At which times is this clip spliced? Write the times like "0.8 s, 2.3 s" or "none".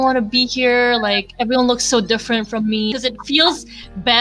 2.9 s